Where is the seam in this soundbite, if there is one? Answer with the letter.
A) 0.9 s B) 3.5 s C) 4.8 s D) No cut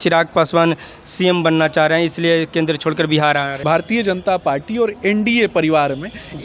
B